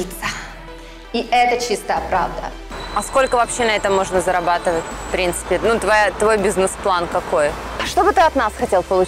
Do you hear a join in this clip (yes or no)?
yes